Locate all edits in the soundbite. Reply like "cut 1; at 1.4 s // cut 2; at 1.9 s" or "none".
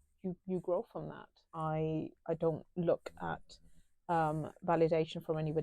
cut 1; at 1.5 s